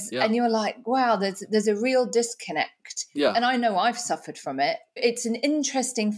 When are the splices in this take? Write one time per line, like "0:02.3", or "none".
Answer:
0:03.2
0:05.0